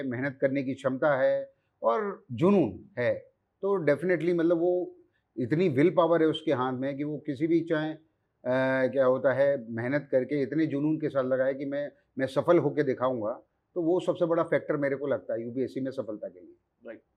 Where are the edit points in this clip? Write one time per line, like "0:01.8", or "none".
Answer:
none